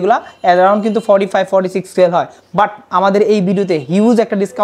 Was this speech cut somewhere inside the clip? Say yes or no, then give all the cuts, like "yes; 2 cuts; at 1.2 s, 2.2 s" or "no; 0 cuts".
no; 0 cuts